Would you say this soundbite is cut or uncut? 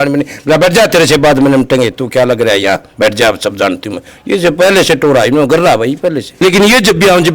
cut